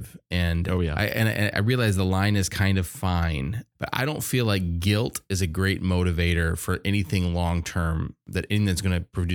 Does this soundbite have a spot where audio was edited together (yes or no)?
yes